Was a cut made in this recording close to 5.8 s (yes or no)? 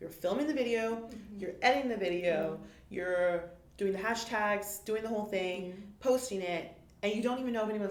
no